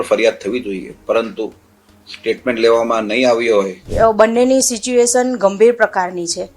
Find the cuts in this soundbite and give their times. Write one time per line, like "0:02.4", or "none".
0:03.8